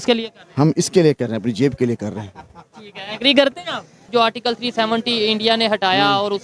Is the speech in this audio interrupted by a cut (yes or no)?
yes